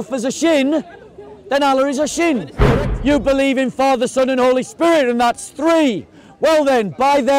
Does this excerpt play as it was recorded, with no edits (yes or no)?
no